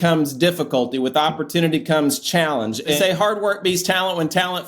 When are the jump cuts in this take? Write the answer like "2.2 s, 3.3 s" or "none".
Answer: 3.0 s